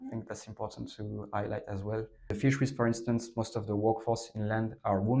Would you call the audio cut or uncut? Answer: cut